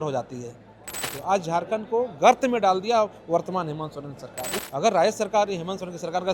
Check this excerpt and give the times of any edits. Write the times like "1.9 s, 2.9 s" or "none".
1.1 s, 4.6 s